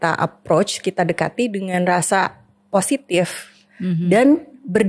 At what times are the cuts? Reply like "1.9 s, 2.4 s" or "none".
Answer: none